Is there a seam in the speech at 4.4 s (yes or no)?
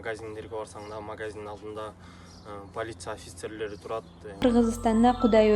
yes